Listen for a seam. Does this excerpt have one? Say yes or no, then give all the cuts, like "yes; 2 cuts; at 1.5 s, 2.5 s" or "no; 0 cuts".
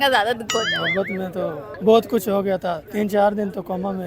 yes; 2 cuts; at 1.7 s, 2.8 s